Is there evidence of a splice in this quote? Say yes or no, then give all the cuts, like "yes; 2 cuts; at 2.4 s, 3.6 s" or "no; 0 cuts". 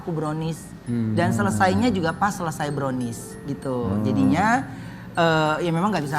no; 0 cuts